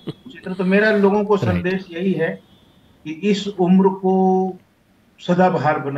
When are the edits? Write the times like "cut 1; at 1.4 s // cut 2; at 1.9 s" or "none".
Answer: none

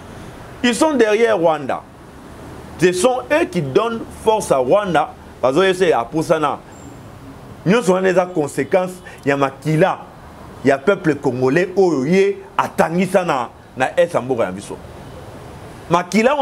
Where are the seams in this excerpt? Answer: cut 1; at 6.7 s

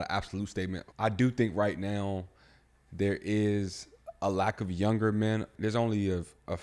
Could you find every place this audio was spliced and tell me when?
cut 1; at 0.8 s // cut 2; at 5.5 s

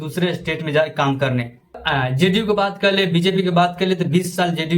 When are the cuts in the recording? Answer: cut 1; at 1.5 s

